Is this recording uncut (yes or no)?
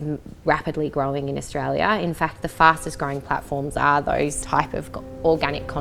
no